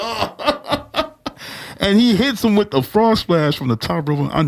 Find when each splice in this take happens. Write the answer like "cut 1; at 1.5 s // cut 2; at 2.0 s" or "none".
none